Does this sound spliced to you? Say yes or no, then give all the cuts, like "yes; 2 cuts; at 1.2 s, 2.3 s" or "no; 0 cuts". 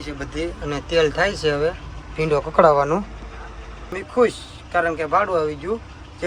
yes; 1 cut; at 4.0 s